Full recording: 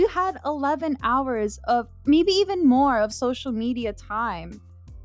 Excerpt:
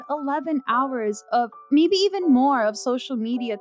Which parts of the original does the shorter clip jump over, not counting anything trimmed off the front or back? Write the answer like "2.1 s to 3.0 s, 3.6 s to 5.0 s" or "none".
none